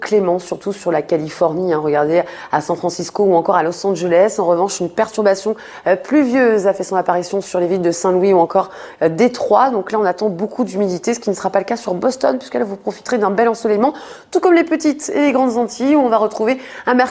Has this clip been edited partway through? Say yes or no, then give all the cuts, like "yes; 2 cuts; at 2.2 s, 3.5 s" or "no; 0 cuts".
yes; 1 cut; at 3.8 s